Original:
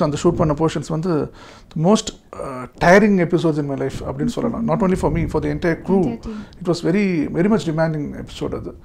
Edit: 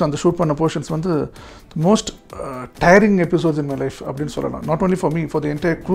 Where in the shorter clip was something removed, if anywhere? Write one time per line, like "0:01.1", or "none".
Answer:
none

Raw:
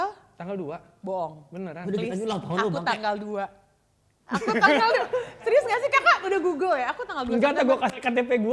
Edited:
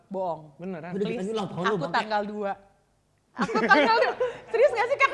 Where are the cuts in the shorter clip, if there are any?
none

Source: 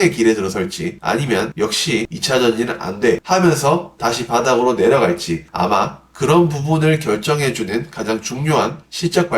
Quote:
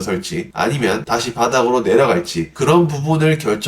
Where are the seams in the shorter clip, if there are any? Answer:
0:01.0
0:02.4

